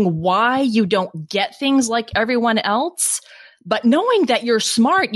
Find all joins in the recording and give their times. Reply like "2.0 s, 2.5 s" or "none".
none